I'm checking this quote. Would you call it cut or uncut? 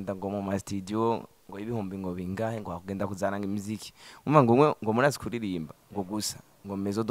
uncut